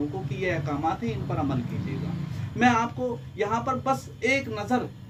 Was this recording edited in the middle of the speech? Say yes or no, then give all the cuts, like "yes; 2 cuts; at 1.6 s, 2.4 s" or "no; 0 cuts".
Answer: no; 0 cuts